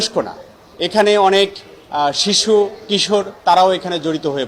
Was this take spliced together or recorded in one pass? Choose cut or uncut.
uncut